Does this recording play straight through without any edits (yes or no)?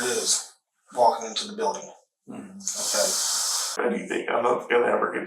no